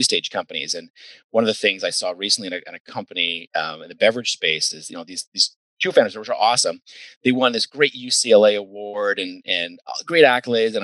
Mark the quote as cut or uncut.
uncut